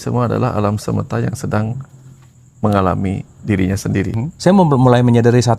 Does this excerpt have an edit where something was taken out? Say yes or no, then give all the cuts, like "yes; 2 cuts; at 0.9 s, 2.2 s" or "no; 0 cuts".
yes; 1 cut; at 4.2 s